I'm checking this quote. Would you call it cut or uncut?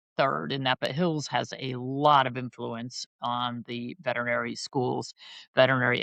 uncut